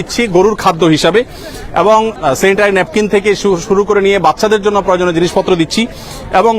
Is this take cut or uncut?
uncut